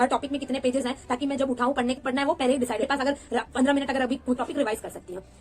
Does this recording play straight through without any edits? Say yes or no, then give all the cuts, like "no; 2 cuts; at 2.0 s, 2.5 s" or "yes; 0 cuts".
no; 3 cuts; at 2.0 s, 2.8 s, 4.4 s